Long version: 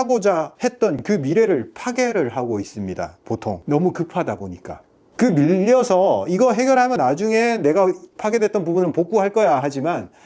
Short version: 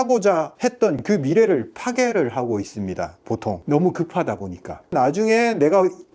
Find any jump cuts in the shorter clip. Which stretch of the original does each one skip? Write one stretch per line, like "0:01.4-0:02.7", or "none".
0:04.9-0:06.9